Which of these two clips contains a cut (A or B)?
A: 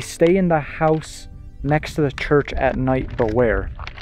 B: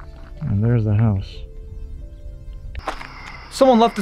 B